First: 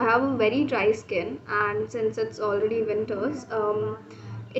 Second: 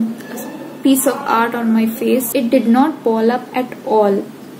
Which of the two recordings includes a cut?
second; 1 cut; at 2.3 s

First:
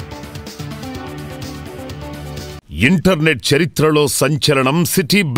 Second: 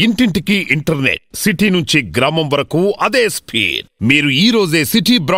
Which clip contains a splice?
first; 1 cut; at 2.6 s

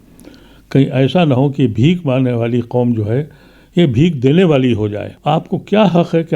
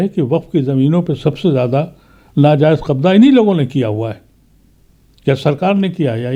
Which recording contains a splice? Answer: first; 1 cut; at 5.1 s

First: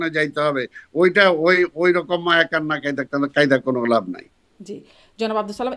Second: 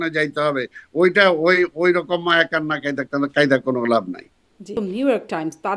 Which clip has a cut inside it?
second; 1 cut; at 4.7 s

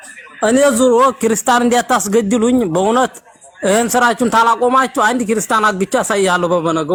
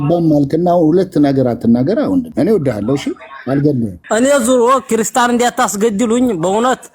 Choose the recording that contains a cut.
second; 2 cuts; at 2.3 s, 4.0 s

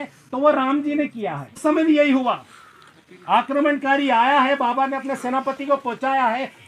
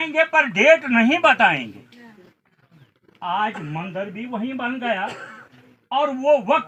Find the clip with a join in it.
first; 1 cut; at 1.6 s

